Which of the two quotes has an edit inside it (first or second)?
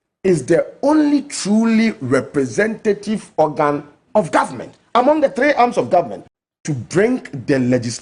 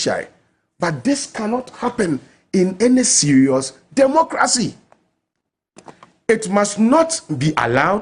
first